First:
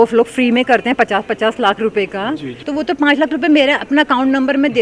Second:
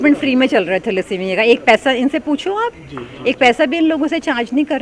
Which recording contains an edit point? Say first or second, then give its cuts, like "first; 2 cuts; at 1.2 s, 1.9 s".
first; 1 cut; at 2.5 s